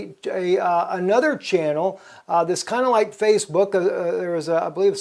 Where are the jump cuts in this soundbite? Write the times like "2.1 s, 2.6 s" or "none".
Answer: 3.2 s